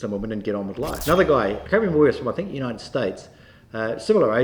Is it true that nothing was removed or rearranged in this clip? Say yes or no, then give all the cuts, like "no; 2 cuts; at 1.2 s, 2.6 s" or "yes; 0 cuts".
no; 2 cuts; at 1.0 s, 1.6 s